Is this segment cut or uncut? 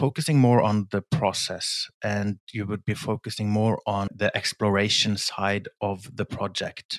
uncut